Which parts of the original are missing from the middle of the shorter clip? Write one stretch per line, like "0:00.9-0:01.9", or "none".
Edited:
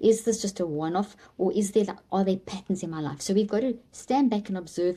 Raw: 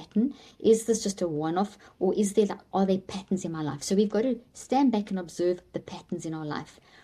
none